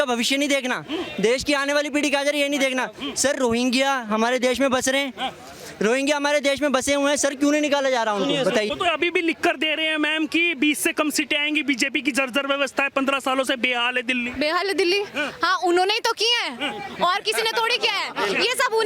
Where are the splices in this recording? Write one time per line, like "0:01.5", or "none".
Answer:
0:08.7
0:14.3